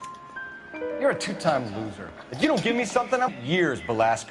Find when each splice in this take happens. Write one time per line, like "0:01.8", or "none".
0:01.0
0:03.3